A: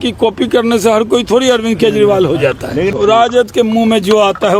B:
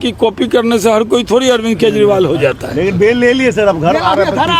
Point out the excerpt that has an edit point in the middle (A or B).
A